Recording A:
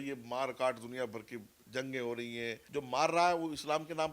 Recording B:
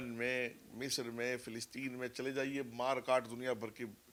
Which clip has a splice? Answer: A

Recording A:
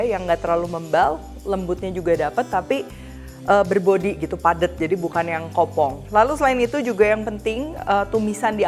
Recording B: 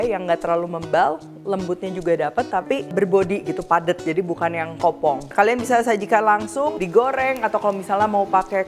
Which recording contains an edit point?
B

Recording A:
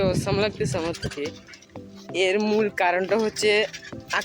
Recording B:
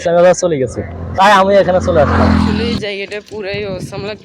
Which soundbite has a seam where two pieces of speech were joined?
B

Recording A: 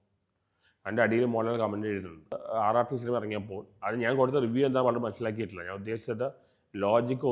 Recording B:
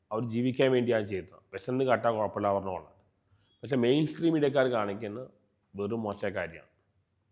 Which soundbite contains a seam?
A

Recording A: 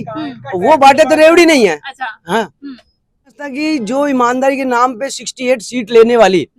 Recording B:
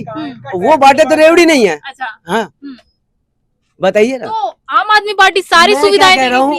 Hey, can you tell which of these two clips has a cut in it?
A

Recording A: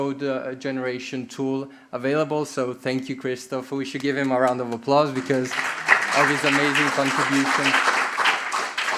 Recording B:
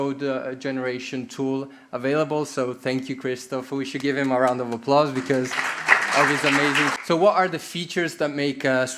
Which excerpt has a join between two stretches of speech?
B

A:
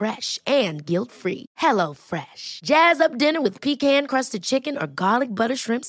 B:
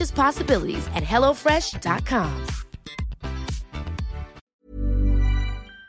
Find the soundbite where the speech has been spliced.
B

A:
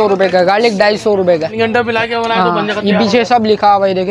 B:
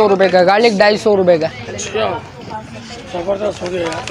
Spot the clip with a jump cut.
A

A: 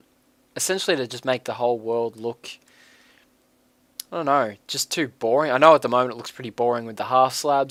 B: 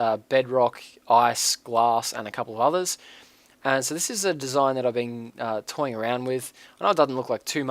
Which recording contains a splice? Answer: B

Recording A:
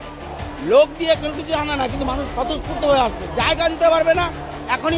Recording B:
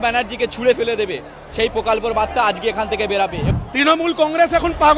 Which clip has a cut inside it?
B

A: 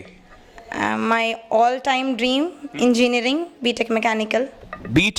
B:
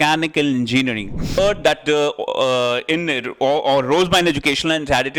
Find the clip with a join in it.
B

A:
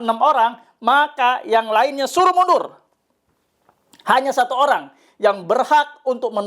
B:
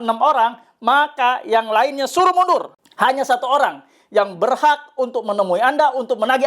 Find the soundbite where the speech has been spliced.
B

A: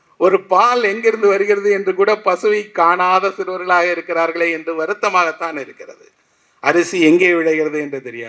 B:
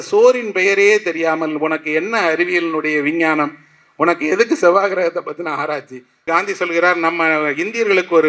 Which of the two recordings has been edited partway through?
B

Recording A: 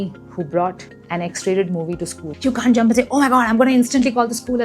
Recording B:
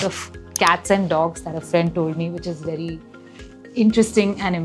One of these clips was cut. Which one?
A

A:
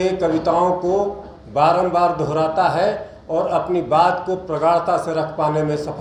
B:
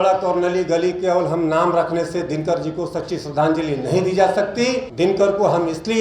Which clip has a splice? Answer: B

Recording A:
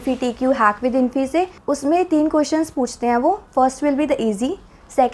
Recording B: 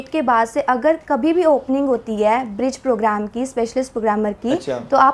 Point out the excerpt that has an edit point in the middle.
A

